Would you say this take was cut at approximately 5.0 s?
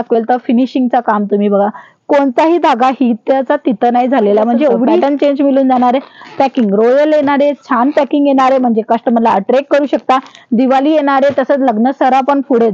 yes; 1 cut; at 5.0 s

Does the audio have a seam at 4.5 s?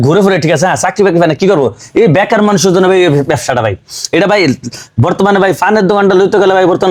no; 0 cuts

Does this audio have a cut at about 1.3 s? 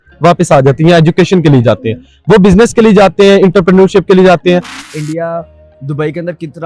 no; 1 cut; at 4.8 s

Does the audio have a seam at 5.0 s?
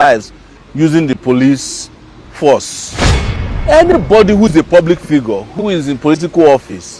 no; 1 cut; at 3.3 s

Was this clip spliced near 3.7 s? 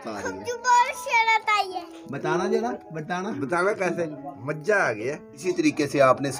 no; 1 cut; at 5.4 s

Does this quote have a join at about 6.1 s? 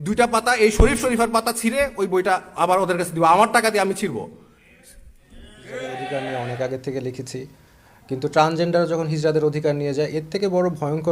yes; 1 cut; at 6.1 s

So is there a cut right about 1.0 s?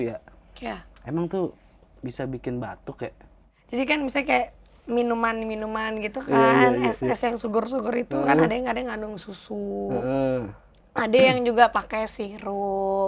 no; 1 cut; at 3.5 s

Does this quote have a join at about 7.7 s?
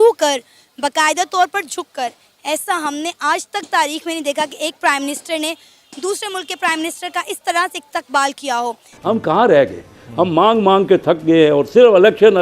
no; 1 cut; at 8.9 s

